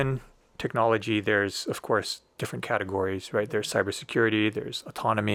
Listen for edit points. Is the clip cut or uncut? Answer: uncut